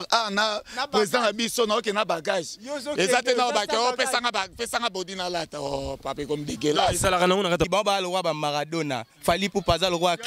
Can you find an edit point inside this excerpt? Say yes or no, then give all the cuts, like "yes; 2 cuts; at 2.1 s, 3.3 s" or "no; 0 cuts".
yes; 1 cut; at 7.7 s